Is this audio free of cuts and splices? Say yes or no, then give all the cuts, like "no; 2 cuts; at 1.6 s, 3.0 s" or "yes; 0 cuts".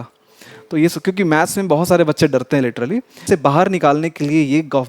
no; 1 cut; at 3.2 s